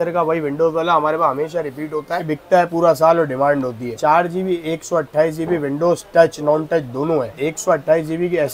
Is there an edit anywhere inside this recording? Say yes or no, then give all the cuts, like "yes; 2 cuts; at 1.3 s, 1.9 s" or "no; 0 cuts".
no; 0 cuts